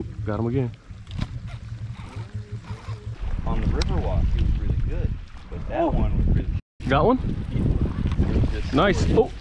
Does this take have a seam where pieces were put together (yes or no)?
yes